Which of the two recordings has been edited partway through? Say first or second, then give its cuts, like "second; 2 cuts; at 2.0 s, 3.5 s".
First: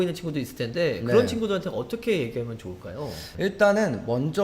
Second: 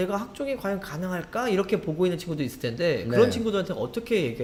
first; 1 cut; at 3.3 s